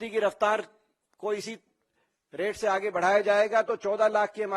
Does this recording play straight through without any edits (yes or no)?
yes